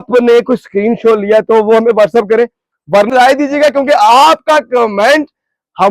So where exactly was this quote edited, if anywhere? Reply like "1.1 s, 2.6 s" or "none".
3.1 s